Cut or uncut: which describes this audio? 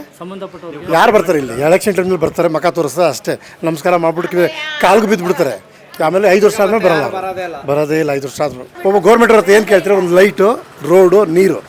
cut